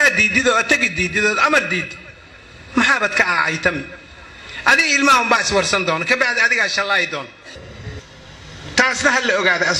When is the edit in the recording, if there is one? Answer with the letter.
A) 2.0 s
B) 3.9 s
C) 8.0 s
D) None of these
C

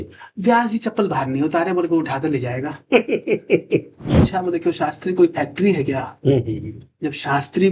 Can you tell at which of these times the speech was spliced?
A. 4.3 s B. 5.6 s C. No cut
A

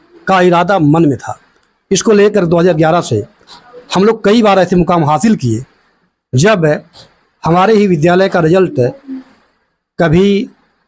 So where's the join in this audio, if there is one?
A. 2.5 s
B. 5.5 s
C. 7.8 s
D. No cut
D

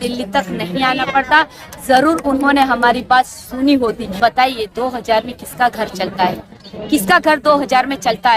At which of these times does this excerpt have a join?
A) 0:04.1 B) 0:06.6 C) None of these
A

